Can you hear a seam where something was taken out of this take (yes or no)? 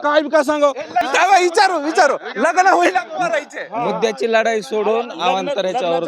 yes